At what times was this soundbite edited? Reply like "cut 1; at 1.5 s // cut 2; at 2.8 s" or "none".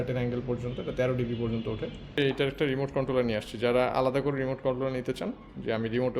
cut 1; at 2.2 s